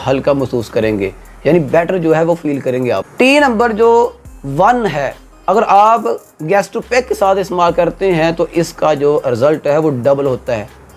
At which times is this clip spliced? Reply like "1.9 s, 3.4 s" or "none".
3.1 s